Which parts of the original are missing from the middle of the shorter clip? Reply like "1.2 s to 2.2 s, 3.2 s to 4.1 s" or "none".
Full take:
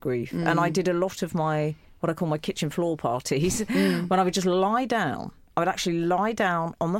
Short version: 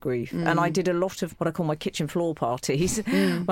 1.2 s to 1.9 s